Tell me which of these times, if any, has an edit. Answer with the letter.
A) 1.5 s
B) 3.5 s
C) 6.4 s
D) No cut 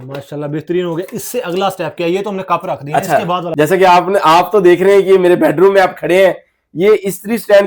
B